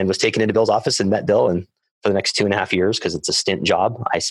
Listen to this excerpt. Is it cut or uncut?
uncut